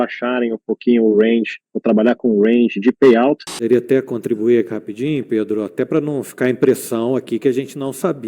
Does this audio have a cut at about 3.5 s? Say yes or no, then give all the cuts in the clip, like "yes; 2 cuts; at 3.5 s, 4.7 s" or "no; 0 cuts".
yes; 1 cut; at 3.5 s